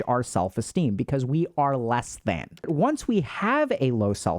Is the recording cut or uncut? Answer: cut